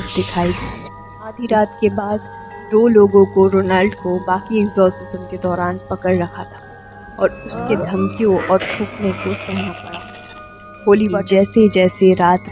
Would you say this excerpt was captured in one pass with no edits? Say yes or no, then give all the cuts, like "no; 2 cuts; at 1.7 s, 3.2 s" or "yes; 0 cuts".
no; 2 cuts; at 1.4 s, 11.2 s